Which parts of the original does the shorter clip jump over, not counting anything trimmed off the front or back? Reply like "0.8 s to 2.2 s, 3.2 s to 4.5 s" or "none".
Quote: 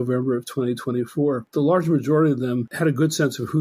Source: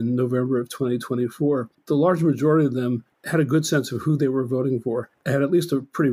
1.7 s to 1.8 s, 3.0 s to 3.2 s